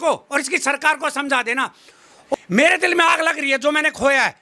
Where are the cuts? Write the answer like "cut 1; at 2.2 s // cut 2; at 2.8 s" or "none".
cut 1; at 2.2 s